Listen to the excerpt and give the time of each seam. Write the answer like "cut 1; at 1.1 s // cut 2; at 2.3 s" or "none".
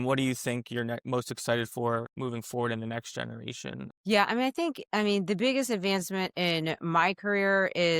none